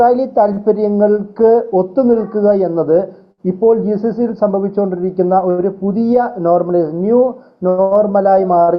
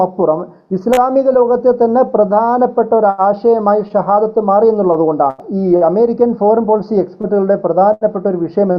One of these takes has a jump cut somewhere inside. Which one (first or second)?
second